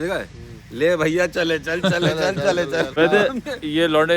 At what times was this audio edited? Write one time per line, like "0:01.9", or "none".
0:02.9